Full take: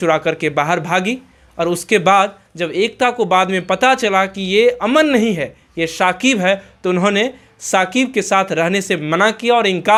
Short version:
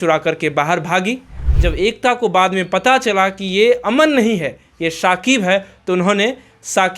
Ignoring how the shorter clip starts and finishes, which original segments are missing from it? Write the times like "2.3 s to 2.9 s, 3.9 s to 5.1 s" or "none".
1.4 s to 2.4 s